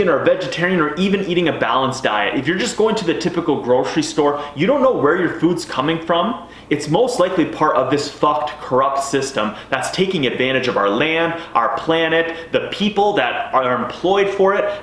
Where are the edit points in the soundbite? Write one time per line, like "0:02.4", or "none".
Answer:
none

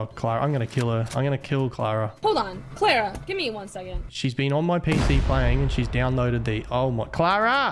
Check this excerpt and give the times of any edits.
0:04.1

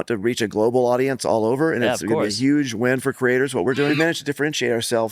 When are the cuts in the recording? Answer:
0:03.9

